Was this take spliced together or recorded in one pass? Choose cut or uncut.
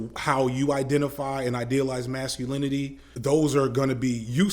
cut